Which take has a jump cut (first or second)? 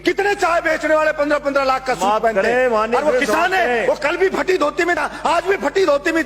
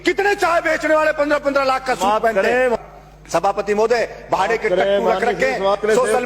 second